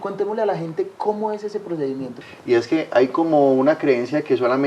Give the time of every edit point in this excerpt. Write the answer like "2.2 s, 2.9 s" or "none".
2.1 s